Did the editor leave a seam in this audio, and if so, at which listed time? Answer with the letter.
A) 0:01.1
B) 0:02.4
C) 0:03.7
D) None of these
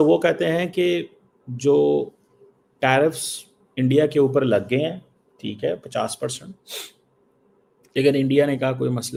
D